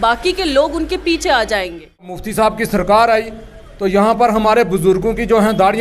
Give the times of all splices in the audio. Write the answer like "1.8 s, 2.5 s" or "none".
2.2 s